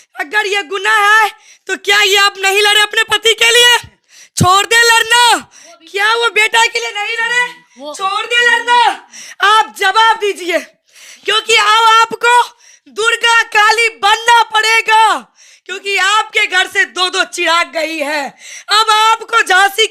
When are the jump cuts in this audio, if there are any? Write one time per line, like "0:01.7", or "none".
none